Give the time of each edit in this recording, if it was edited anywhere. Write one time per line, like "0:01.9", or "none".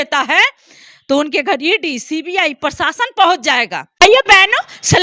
0:03.8